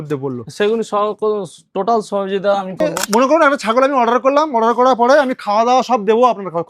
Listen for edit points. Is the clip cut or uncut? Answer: cut